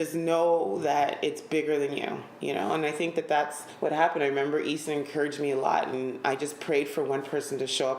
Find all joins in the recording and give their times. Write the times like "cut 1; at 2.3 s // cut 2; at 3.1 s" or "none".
cut 1; at 3.6 s

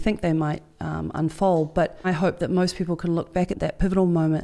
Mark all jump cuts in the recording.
cut 1; at 2.1 s // cut 2; at 3.5 s

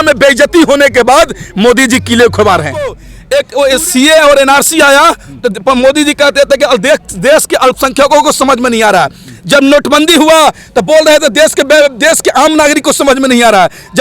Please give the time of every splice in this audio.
cut 1; at 3.1 s

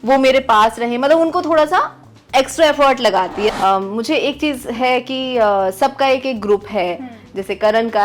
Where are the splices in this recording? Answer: cut 1; at 3.5 s

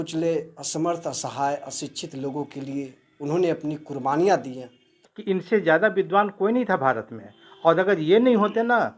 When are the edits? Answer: cut 1; at 5.0 s

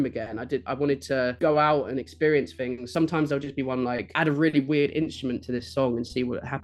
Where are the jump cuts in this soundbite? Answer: cut 1; at 1.3 s // cut 2; at 2.8 s // cut 3; at 4.1 s

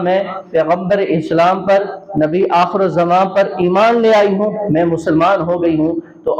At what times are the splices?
none

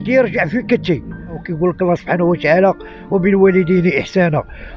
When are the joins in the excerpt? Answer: cut 1; at 1.4 s

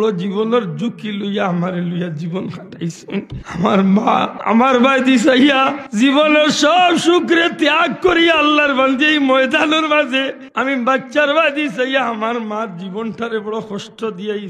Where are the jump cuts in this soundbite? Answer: cut 1; at 3.4 s // cut 2; at 4.3 s // cut 3; at 5.8 s // cut 4; at 10.4 s

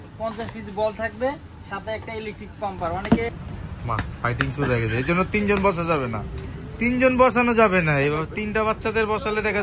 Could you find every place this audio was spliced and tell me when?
cut 1; at 3.0 s

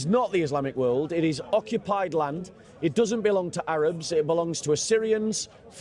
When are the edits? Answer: none

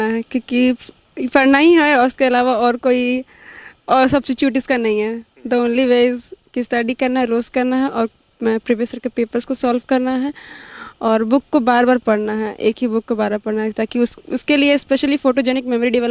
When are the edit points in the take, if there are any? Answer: none

